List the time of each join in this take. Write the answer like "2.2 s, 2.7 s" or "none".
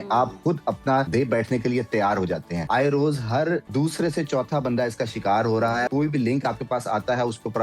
1.1 s, 2.6 s, 3.7 s, 5.9 s